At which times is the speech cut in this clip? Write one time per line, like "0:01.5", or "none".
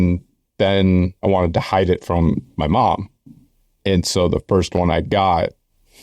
0:01.1

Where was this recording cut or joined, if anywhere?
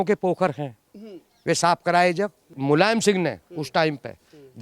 0:02.5

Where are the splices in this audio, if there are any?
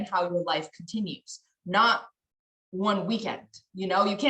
none

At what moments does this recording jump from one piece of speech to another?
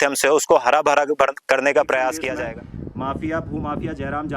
0:02.1

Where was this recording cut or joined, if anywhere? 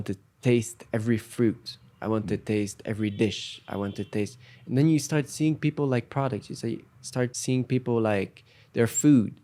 0:07.3

